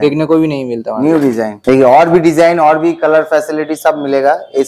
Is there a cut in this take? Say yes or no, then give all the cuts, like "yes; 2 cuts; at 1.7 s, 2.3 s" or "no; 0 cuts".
yes; 1 cut; at 1.5 s